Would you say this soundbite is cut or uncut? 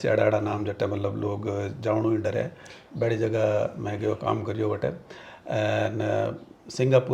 uncut